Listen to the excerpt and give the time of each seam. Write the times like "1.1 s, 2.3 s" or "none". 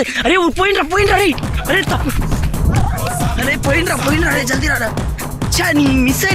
none

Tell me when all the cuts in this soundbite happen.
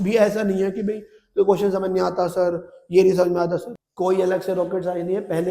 3.7 s

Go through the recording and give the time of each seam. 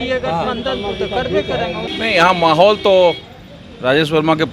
1.9 s

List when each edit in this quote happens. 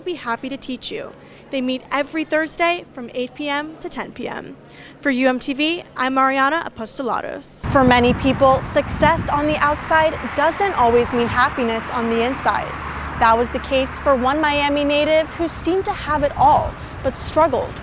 none

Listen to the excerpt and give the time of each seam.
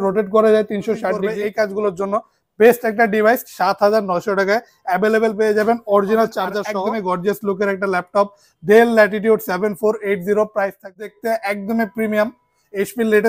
1.3 s, 6.7 s, 11.1 s

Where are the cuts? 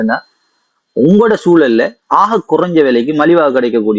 none

